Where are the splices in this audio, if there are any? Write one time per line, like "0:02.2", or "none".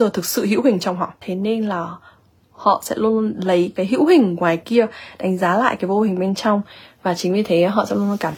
0:01.2